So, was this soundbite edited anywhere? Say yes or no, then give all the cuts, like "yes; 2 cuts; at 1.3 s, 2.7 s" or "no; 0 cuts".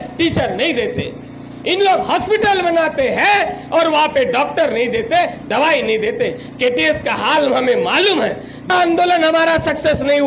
yes; 1 cut; at 8.7 s